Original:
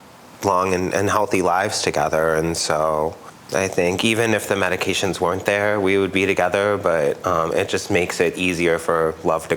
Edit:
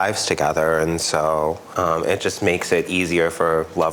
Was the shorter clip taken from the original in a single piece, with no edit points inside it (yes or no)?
no